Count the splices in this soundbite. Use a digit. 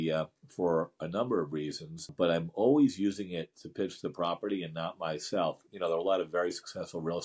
2